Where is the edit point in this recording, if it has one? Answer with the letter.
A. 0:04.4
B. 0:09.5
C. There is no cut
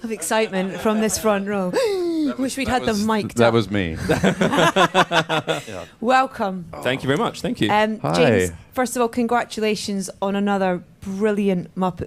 B